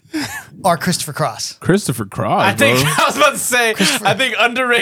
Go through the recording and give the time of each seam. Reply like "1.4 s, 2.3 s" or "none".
1.5 s